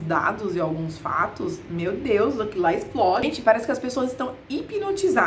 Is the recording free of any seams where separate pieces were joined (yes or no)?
no